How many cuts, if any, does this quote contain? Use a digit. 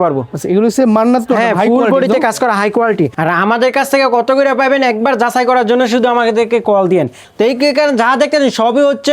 2